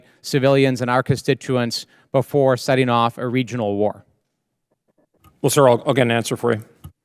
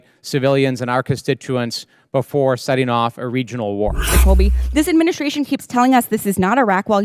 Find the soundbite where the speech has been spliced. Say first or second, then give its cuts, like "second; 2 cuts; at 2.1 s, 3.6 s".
second; 1 cut; at 4.2 s